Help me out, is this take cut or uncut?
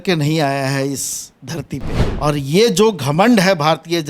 cut